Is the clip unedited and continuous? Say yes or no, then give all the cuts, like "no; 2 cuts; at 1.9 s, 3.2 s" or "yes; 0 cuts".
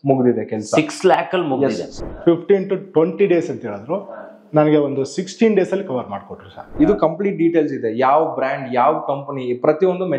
no; 2 cuts; at 1.9 s, 6.7 s